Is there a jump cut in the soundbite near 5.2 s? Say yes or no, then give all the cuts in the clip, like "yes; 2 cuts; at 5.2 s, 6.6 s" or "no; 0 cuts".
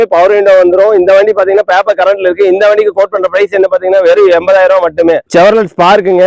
yes; 1 cut; at 5.2 s